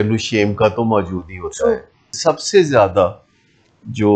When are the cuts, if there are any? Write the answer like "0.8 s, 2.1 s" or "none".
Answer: 2.1 s